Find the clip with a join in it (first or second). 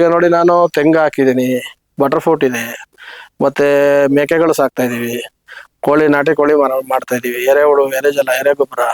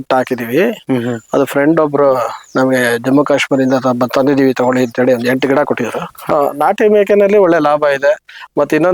second